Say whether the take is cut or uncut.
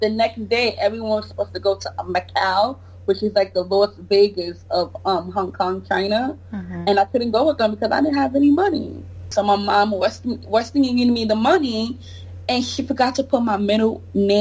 cut